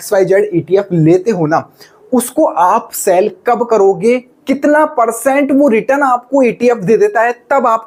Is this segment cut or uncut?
uncut